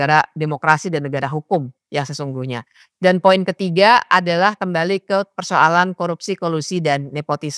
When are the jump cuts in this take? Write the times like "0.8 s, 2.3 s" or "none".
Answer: none